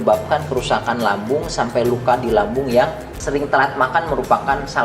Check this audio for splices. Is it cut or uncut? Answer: cut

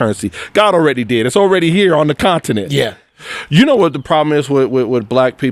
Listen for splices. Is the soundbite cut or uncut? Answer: cut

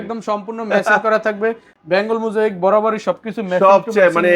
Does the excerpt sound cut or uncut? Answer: uncut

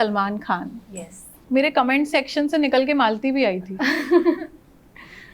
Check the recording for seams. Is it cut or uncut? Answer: cut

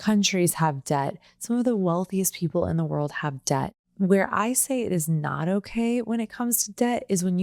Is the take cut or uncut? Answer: cut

